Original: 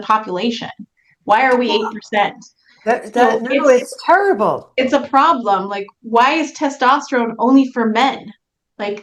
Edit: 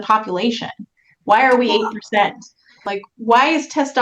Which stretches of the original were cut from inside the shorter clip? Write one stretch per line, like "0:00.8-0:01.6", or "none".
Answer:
0:02.8-0:05.6